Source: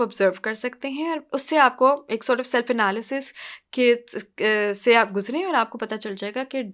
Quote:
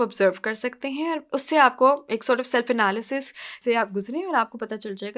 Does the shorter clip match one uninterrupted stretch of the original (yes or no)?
no